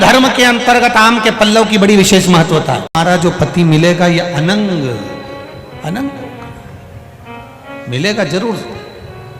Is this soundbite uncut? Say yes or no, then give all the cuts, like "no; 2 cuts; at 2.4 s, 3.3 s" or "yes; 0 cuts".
no; 1 cut; at 2.9 s